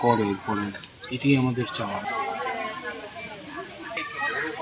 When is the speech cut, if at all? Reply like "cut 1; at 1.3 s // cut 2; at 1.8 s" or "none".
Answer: cut 1; at 2.0 s